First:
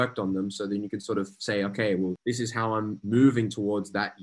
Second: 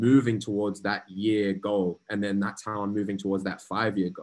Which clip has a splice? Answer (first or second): first